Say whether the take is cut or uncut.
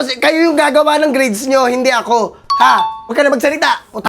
cut